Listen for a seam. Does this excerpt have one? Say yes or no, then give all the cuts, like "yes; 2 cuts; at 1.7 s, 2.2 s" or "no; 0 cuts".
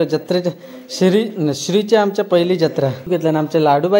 yes; 1 cut; at 3.1 s